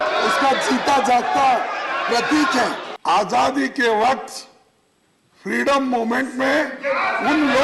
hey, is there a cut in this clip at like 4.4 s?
no; 1 cut; at 2.9 s

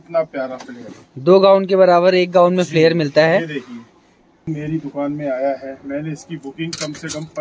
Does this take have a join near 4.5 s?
yes; 1 cut; at 4.5 s

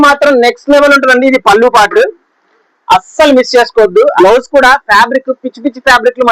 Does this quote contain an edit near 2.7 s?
no; 1 cut; at 4.1 s

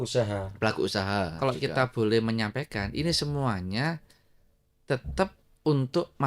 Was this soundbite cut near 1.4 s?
yes; 1 cut; at 1.4 s

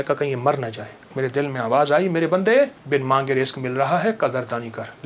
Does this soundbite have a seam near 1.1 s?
yes; 2 cuts; at 1.1 s, 2.8 s

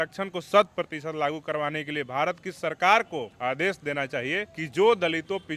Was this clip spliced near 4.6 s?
yes; 2 cuts; at 3.3 s, 4.6 s

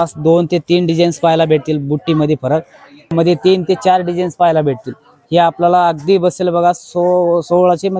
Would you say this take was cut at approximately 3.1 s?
yes; 1 cut; at 3.1 s

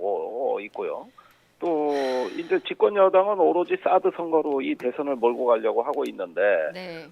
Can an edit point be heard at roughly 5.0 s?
yes; 1 cut; at 5.0 s

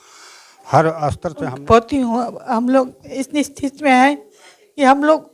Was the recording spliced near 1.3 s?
yes; 1 cut; at 1.3 s

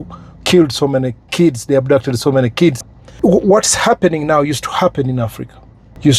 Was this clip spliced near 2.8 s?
yes; 1 cut; at 2.8 s

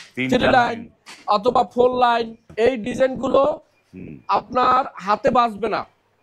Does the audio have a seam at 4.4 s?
no; 1 cut; at 2.5 s

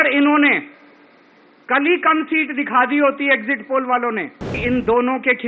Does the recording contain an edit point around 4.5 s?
yes; 1 cut; at 4.5 s

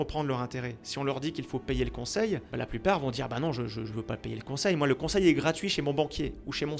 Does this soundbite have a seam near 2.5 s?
yes; 1 cut; at 2.5 s

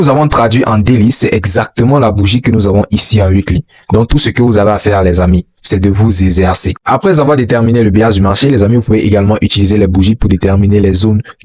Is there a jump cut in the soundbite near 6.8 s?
yes; 1 cut; at 6.8 s

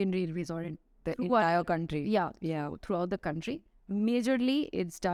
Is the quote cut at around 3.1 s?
no; 0 cuts

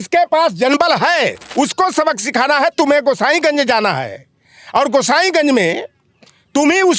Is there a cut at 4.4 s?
no; 1 cut; at 1.4 s

